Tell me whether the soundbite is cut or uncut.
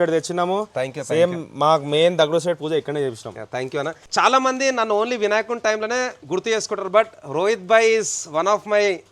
cut